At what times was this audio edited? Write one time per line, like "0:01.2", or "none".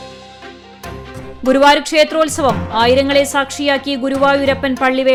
none